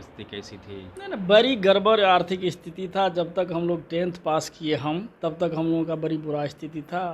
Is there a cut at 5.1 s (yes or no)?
yes